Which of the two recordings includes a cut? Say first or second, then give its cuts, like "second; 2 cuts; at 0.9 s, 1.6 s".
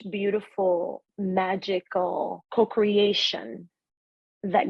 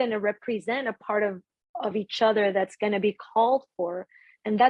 first; 2 cuts; at 1.0 s, 2.4 s